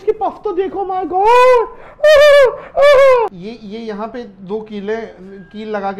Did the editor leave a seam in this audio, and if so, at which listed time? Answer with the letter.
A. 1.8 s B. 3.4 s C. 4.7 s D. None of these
B